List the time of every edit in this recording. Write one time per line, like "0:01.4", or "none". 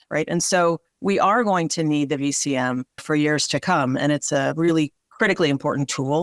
0:00.9
0:03.0
0:05.0